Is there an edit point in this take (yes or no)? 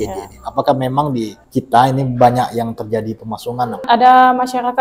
yes